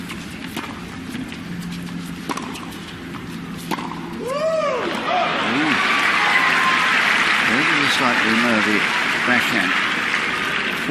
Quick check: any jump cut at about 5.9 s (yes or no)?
yes